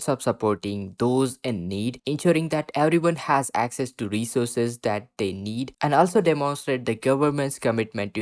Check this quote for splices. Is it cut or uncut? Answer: uncut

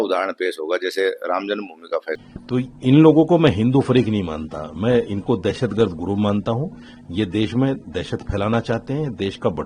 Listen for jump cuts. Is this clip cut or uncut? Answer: cut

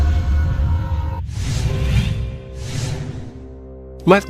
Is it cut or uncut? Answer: uncut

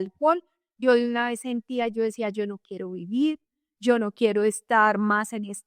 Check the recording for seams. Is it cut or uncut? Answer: uncut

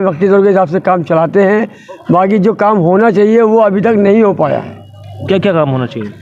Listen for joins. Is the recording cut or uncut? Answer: uncut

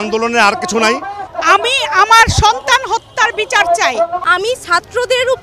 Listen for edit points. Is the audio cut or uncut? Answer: cut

